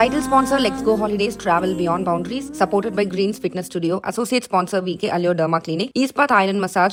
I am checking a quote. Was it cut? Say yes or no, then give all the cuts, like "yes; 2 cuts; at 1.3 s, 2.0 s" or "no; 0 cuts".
no; 0 cuts